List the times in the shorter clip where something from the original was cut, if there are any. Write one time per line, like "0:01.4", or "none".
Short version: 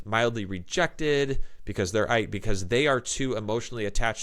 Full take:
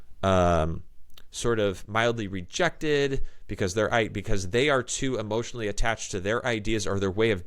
none